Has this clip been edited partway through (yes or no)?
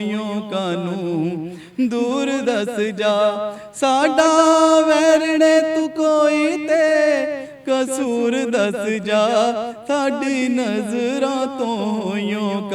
no